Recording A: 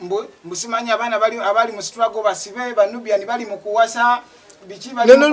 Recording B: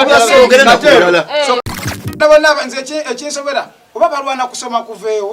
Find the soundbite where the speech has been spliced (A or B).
B